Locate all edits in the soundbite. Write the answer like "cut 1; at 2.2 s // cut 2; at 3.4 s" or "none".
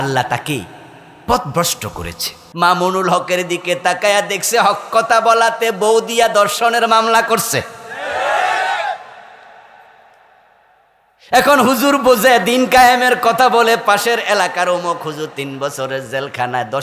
cut 1; at 2.4 s